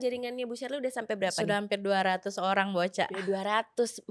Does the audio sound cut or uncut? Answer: uncut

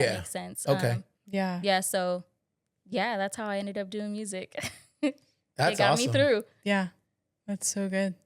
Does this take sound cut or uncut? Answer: uncut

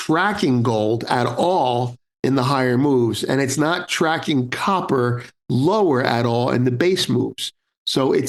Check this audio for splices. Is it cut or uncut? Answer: uncut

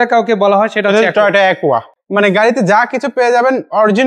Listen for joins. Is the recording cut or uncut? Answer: cut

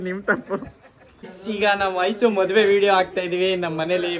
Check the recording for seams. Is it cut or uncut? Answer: cut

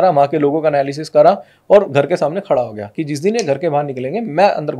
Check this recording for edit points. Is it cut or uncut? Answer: uncut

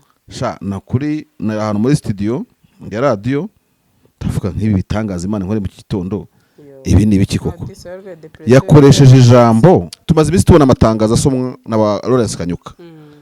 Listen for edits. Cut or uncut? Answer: cut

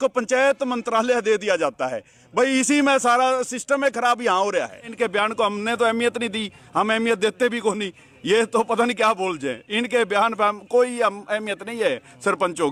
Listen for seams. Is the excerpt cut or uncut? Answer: uncut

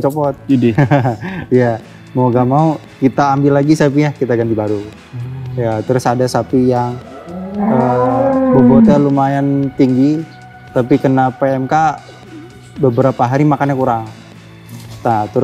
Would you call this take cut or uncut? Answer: uncut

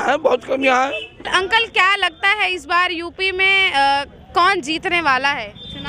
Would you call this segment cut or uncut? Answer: cut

